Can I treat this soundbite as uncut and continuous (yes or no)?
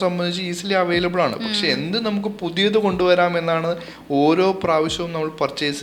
yes